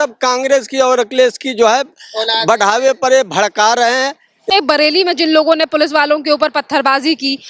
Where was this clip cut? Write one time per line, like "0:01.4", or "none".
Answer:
0:04.5